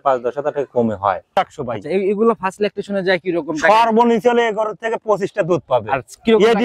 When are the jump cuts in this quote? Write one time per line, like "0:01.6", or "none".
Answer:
0:01.3